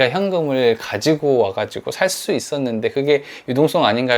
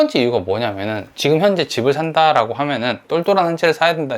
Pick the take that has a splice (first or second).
second